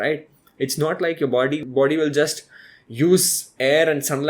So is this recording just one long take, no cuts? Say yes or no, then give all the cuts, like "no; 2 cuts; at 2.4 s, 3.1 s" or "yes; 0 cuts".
no; 1 cut; at 1.6 s